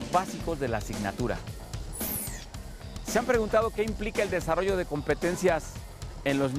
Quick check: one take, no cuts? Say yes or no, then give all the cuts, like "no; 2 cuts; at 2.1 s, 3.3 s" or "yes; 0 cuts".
no; 1 cut; at 5.2 s